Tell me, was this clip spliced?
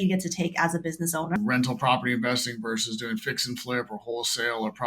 yes; 1 cut; at 1.4 s

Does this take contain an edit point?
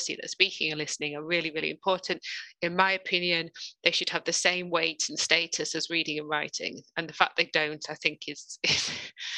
no; 0 cuts

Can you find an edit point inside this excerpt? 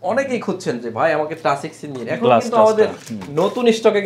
no; 0 cuts

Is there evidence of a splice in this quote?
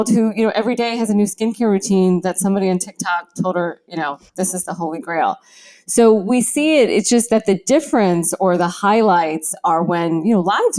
no; 0 cuts

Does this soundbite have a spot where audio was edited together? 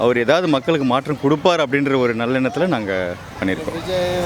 no; 0 cuts

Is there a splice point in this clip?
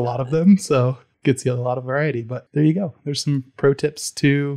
yes; 2 cuts; at 1.1 s, 2.4 s

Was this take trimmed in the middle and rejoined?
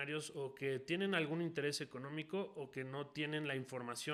no; 0 cuts

